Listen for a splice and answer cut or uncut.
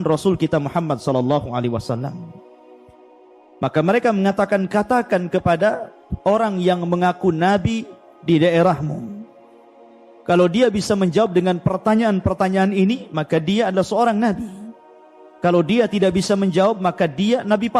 uncut